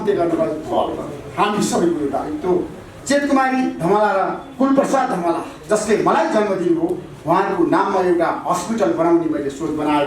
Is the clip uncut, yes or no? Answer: no